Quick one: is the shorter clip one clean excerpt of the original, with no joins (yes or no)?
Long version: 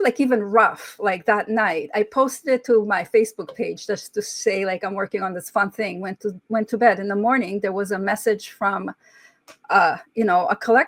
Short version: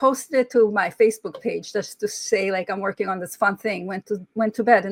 yes